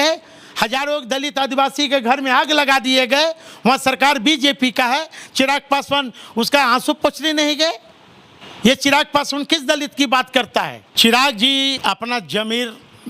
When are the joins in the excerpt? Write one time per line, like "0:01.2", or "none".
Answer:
0:10.8
0:11.8